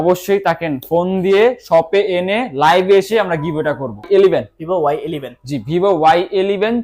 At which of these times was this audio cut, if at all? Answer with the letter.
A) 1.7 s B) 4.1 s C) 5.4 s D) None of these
B